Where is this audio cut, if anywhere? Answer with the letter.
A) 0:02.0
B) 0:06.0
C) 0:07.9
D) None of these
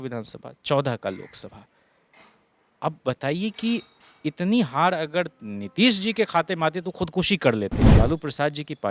C